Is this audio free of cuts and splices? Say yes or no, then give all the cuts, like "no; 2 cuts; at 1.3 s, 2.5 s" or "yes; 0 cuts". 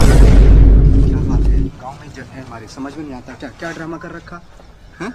no; 2 cuts; at 1.1 s, 1.8 s